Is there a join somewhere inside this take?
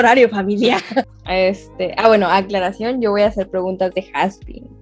yes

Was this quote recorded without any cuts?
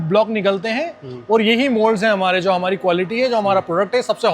yes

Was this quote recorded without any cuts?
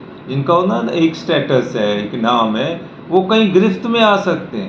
yes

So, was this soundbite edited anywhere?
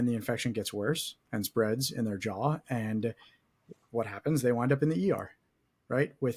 no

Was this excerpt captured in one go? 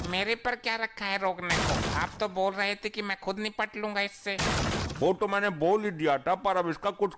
yes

